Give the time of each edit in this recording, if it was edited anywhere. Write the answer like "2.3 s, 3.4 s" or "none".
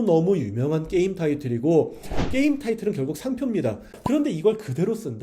4.0 s